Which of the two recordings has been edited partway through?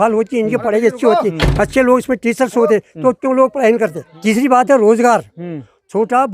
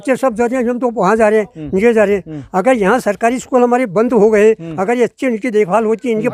first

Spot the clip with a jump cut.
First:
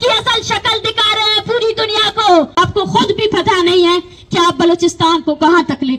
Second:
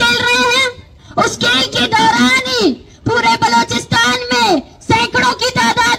first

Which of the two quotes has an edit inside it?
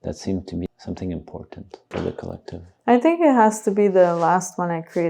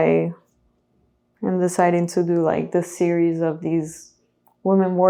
first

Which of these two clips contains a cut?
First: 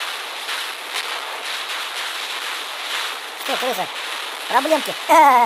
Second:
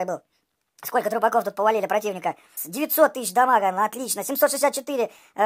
second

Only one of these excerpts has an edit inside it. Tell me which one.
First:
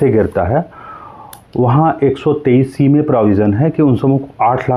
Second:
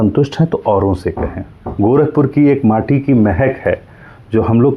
second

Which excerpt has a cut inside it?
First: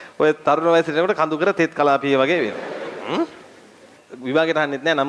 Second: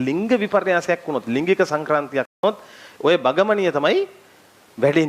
first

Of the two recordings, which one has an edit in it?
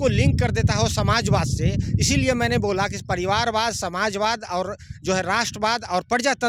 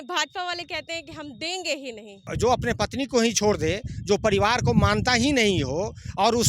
second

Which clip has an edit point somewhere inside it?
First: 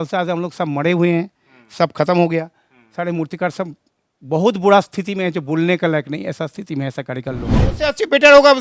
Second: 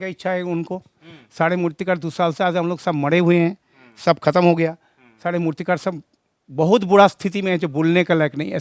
first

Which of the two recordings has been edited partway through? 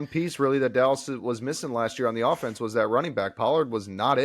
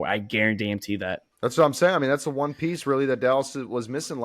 second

